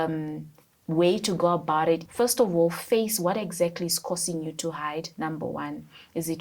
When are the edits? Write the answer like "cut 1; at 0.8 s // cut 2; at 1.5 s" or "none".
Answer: cut 1; at 2.1 s